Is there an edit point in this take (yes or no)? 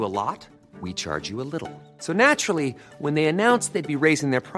no